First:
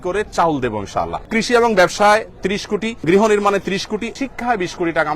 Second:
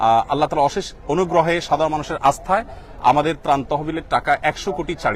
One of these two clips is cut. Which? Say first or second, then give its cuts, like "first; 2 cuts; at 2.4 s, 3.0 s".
first; 3 cuts; at 1.3 s, 3.0 s, 4.1 s